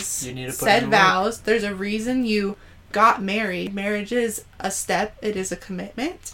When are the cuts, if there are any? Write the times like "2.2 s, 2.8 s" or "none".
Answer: 3.7 s